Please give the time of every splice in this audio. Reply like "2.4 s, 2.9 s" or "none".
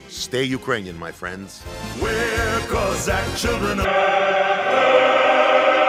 none